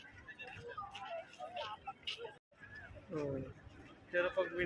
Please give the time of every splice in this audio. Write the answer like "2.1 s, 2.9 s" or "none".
2.6 s